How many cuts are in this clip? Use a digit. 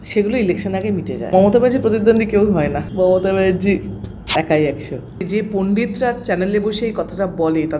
3